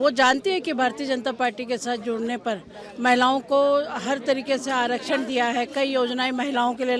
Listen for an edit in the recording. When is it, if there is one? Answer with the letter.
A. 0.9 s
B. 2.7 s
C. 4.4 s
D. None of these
D